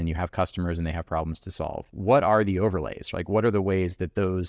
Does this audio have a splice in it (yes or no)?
yes